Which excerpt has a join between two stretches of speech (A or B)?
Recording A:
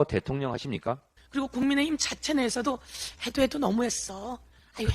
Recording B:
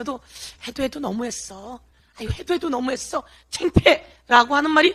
A